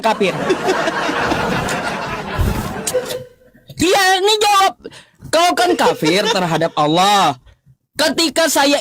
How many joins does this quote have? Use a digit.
0